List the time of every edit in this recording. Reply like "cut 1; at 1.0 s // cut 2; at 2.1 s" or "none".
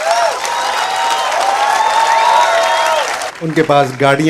cut 1; at 3.3 s